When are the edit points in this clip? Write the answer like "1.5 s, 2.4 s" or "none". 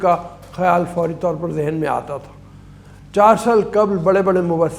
none